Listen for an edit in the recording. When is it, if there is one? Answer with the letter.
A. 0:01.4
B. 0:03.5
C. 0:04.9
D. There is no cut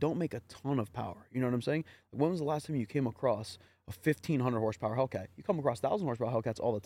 D